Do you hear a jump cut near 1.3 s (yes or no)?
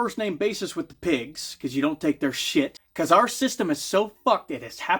no